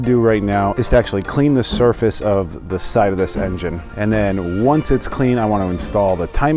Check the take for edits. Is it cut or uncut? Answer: uncut